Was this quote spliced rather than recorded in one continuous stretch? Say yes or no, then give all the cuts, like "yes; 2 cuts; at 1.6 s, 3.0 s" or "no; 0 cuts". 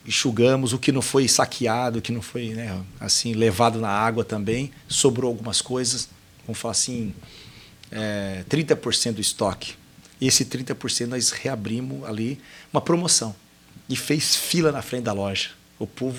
no; 0 cuts